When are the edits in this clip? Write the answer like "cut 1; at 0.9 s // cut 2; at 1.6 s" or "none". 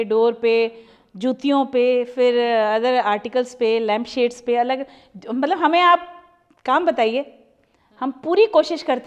none